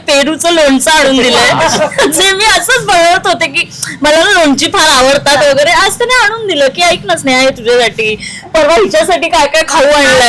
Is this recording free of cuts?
yes; 0 cuts

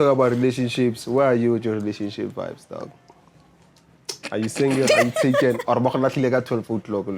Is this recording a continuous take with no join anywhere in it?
yes; 0 cuts

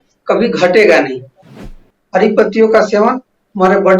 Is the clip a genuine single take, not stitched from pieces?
no; 1 cut; at 1.5 s

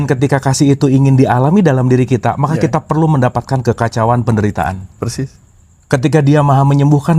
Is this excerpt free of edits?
yes; 0 cuts

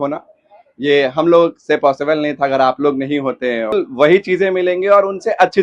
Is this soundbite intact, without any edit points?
no; 1 cut; at 3.7 s

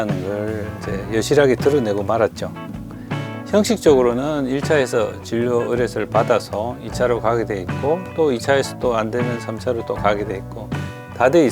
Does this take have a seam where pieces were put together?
yes; 1 cut; at 2.8 s

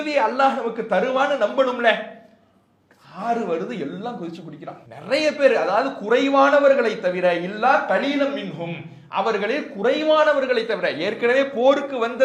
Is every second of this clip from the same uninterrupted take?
yes; 0 cuts

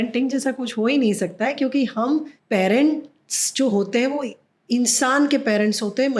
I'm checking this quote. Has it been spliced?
yes; 1 cut; at 2.3 s

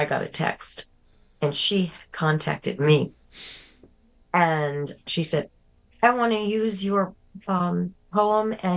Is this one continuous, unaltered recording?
no; 1 cut; at 5.0 s

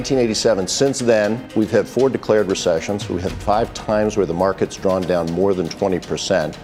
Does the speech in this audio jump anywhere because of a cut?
yes; 1 cut; at 1.4 s

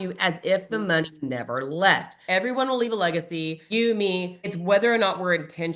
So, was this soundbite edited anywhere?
yes; 3 cuts; at 2.1 s, 3.6 s, 4.5 s

